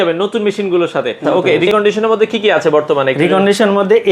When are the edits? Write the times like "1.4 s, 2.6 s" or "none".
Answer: 1.5 s